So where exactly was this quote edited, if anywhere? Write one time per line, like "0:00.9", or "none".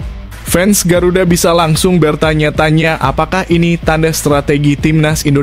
none